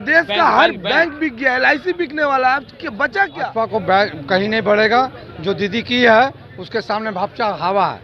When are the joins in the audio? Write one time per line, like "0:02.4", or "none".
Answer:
0:03.4